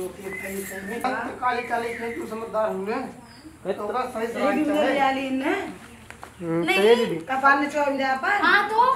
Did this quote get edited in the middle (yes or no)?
yes